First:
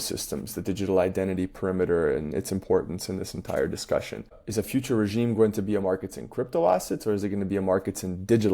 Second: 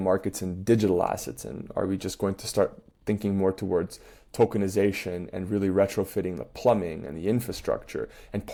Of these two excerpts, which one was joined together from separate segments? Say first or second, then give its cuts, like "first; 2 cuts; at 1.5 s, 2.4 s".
first; 1 cut; at 4.4 s